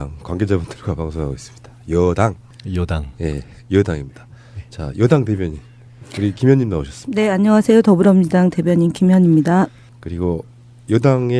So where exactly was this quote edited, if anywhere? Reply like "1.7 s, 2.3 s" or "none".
2.3 s